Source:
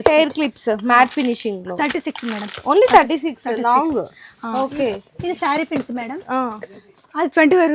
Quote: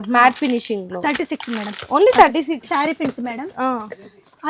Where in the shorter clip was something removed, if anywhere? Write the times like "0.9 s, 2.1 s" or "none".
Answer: 2.6 s